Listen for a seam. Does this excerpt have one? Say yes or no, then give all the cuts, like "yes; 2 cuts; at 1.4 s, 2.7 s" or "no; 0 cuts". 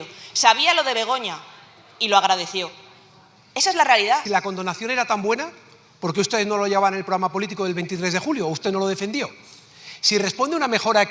yes; 1 cut; at 4.2 s